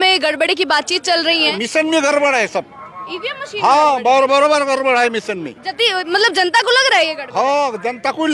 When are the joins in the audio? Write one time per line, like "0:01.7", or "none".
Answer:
0:01.5